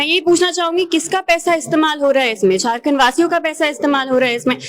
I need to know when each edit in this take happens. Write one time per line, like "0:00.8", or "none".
none